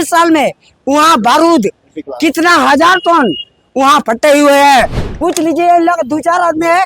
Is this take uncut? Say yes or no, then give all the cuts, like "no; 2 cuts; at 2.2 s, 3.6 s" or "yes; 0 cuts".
no; 1 cut; at 5.0 s